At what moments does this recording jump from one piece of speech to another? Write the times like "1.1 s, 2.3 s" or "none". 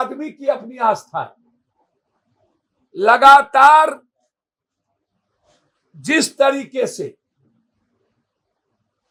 none